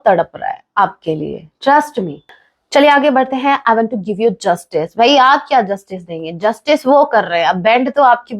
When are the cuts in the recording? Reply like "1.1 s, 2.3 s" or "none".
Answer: 2.3 s